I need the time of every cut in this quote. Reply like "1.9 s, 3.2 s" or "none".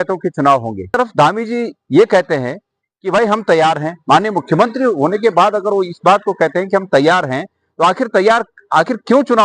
1.0 s